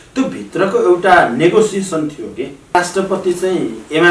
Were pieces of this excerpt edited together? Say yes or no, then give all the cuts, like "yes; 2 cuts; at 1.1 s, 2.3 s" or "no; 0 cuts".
yes; 1 cut; at 2.7 s